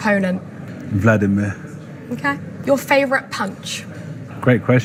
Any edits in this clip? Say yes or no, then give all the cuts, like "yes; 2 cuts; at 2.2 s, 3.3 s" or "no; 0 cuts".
no; 0 cuts